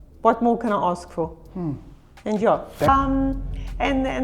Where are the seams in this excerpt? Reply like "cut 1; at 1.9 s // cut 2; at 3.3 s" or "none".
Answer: cut 1; at 2.9 s